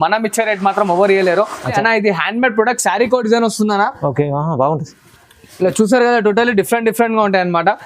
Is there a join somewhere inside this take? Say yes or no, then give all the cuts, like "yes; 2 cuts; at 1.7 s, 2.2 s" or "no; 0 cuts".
yes; 1 cut; at 1.7 s